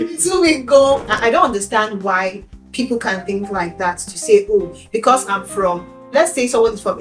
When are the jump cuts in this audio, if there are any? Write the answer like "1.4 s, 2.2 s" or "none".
1.1 s